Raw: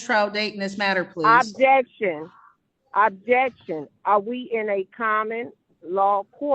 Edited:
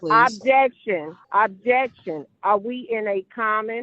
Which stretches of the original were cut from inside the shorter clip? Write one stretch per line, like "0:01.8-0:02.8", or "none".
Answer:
0:02.3-0:02.8